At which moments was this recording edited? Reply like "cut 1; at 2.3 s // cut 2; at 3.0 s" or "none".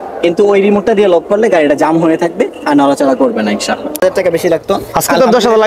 cut 1; at 4.0 s